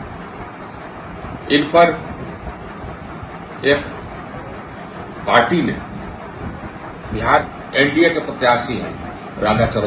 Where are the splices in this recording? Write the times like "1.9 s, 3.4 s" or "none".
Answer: 7.5 s